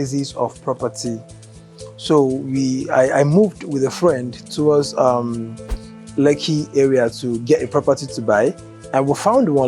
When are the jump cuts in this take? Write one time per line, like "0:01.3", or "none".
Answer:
none